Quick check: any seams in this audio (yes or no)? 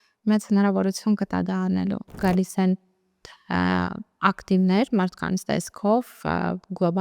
yes